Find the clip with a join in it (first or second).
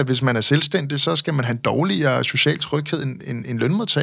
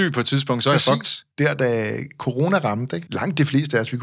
second